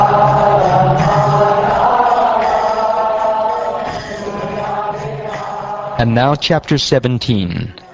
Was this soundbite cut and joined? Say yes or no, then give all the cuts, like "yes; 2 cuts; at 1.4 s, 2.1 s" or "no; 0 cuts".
no; 0 cuts